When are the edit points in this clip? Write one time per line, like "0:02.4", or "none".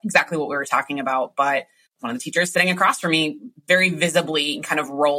0:01.8